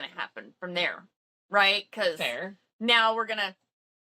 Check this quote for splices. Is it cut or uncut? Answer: uncut